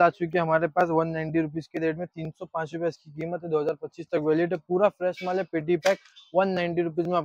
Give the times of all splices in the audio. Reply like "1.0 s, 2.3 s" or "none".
none

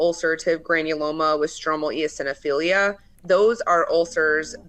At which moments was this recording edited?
3.1 s

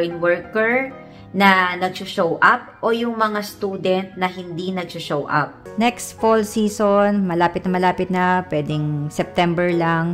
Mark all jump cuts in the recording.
5.6 s

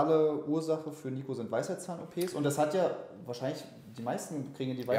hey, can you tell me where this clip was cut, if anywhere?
none

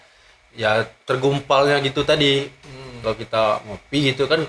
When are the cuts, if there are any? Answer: 3.0 s

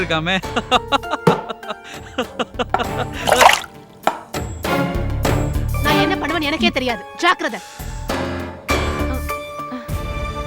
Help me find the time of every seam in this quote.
6.2 s

